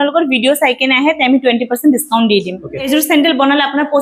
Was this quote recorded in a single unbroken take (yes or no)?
no